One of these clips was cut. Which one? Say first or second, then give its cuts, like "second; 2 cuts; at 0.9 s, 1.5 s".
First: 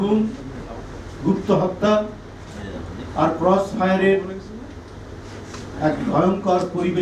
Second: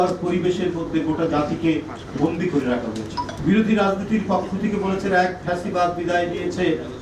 second; 1 cut; at 3.3 s